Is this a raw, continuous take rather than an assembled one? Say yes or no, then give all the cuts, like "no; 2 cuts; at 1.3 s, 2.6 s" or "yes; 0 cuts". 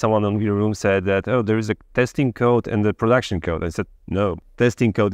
yes; 0 cuts